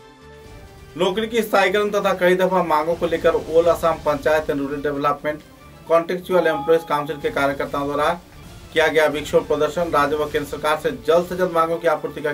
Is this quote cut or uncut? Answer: uncut